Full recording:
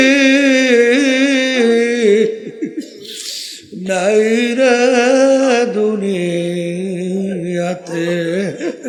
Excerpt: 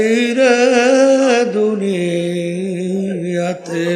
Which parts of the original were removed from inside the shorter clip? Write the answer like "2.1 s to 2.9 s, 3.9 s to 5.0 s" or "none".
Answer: none

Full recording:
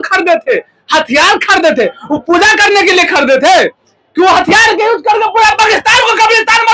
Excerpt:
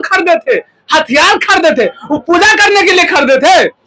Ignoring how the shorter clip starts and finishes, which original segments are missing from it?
none

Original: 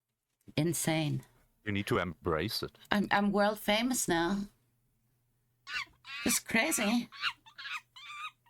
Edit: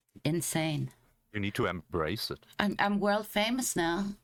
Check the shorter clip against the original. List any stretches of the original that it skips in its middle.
none

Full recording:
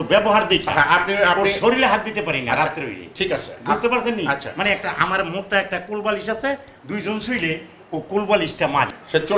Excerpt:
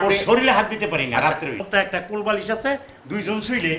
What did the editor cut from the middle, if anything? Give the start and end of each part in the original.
3.0 s to 5.4 s

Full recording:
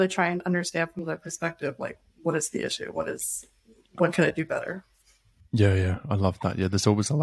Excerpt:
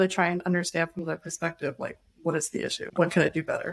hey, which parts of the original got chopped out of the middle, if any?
2.8 s to 3.8 s

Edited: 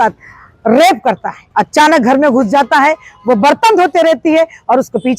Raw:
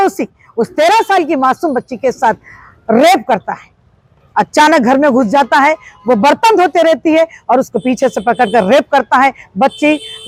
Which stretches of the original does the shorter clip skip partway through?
3.6 s to 4.1 s

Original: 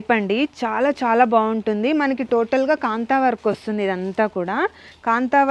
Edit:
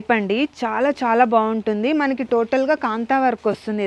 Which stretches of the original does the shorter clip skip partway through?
none

